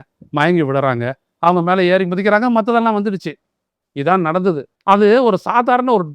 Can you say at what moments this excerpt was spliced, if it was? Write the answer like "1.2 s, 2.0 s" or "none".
4.7 s